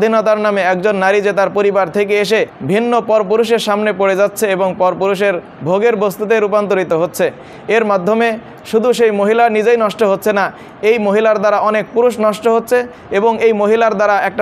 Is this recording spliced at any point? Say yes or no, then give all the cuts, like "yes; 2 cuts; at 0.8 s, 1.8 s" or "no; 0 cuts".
no; 0 cuts